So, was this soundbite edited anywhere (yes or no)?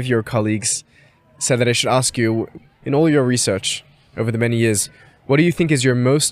yes